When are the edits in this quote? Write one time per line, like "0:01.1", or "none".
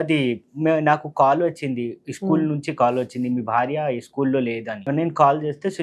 0:04.8